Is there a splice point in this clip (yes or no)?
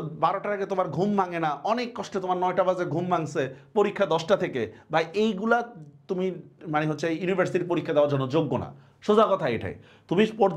no